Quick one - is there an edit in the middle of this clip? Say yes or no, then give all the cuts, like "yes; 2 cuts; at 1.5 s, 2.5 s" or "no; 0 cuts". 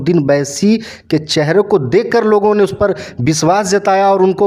no; 0 cuts